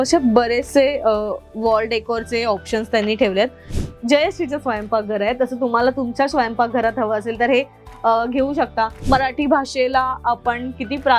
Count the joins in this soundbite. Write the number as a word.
two